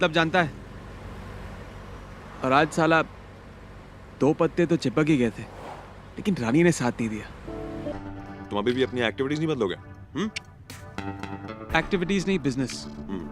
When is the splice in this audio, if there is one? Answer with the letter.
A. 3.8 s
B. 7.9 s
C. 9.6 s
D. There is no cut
B